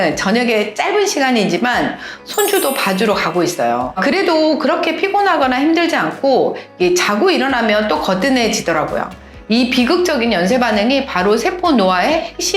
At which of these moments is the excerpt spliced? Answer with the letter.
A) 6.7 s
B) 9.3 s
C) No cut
B